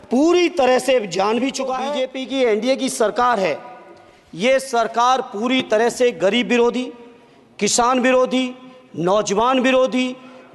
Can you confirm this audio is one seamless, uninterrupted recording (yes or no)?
no